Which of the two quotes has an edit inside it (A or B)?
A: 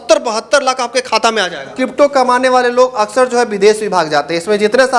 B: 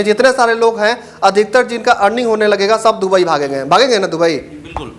A